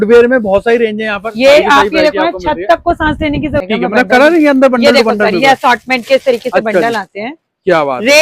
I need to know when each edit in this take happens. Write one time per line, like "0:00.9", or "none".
0:03.6